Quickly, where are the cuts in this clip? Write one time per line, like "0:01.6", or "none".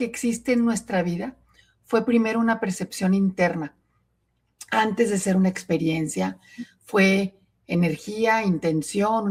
none